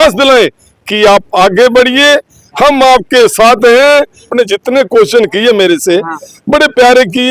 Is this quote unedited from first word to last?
no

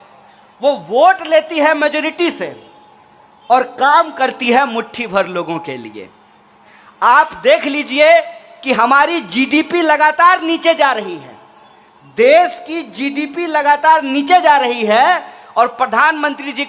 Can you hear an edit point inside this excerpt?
no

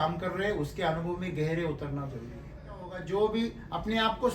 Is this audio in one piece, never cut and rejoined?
no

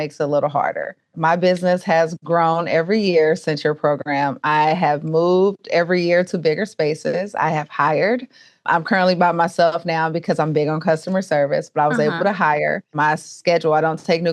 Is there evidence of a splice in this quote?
yes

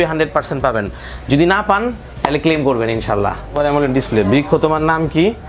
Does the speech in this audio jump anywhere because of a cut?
yes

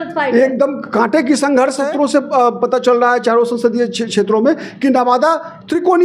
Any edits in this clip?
yes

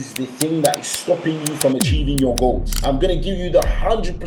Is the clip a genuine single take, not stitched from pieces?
yes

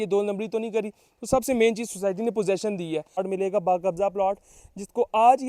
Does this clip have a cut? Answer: yes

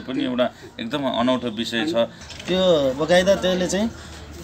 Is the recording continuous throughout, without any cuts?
no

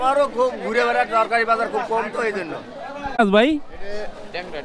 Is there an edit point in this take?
yes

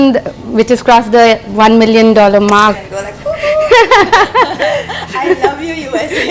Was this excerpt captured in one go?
no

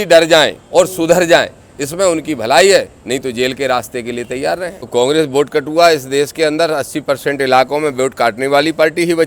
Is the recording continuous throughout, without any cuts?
no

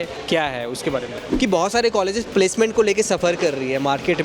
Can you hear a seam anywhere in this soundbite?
yes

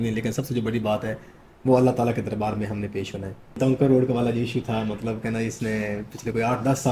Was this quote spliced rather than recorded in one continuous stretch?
yes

